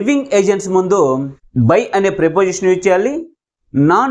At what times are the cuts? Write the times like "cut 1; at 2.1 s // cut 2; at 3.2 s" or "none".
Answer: none